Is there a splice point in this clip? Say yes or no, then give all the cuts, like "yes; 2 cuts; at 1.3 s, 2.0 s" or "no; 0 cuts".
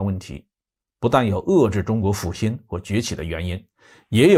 no; 0 cuts